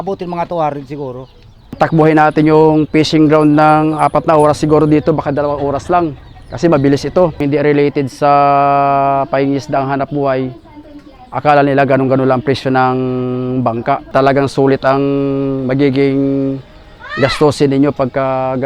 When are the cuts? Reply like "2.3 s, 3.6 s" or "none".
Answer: 1.8 s, 7.4 s, 14.1 s